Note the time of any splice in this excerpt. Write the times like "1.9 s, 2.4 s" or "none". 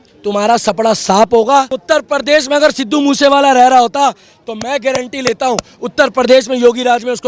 1.8 s

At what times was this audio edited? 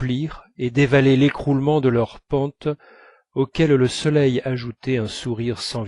0.9 s

